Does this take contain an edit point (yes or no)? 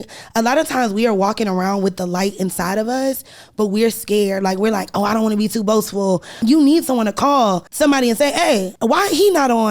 yes